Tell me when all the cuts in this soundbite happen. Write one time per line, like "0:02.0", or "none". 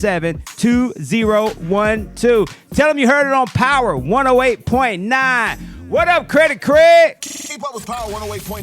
0:07.3